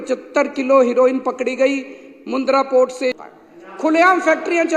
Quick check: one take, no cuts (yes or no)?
no